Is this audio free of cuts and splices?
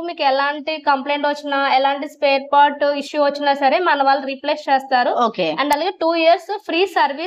yes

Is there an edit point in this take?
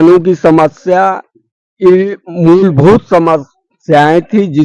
no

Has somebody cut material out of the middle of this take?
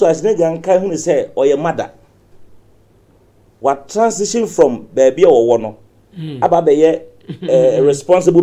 no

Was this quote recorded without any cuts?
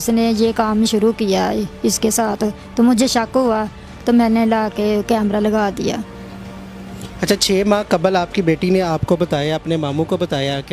yes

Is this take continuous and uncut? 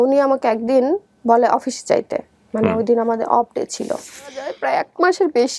no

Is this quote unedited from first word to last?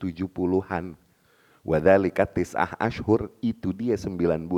yes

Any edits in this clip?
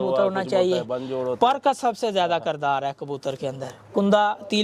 no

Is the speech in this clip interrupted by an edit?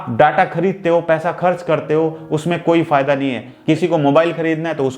yes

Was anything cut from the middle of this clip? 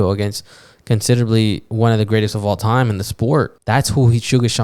yes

